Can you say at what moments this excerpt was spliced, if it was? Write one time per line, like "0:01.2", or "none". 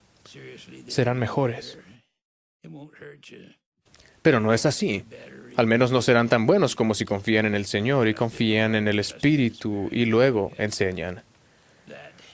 0:08.6